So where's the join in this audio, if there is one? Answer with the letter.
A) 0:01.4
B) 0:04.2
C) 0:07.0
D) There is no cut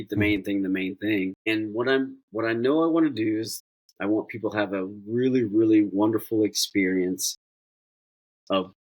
A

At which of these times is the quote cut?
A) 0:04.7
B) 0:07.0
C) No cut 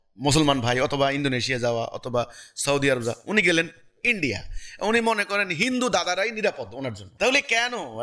B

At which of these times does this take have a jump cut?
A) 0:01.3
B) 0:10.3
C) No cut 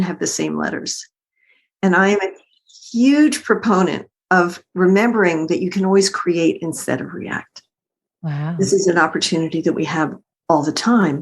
B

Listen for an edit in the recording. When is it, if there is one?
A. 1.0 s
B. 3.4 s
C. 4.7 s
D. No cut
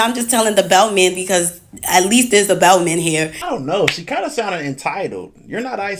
B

